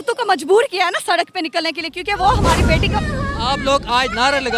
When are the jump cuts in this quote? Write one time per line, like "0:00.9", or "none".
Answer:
0:02.9